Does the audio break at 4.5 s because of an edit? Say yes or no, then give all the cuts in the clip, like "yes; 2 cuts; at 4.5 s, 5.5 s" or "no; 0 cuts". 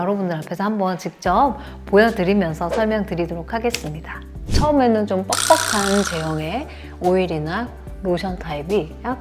yes; 1 cut; at 4.5 s